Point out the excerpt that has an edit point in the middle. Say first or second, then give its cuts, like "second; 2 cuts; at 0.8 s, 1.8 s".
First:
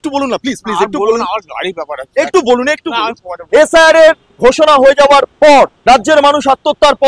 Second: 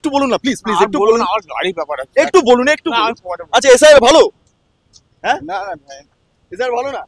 first; 3 cuts; at 3.3 s, 4.3 s, 5.8 s